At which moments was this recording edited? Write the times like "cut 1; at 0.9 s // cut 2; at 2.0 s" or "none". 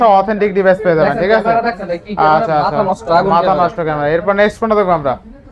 none